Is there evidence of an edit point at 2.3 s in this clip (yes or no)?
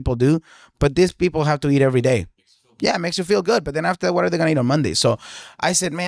no